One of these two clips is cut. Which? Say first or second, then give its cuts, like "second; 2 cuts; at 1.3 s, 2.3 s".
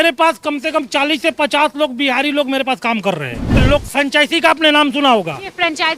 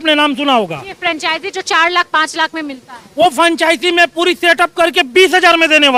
first; 1 cut; at 3.6 s